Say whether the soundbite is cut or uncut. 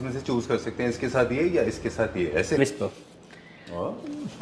cut